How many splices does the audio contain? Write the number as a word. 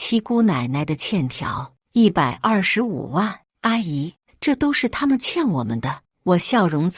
one